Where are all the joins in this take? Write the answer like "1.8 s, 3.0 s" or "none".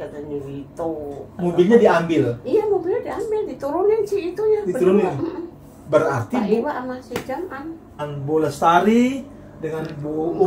8.0 s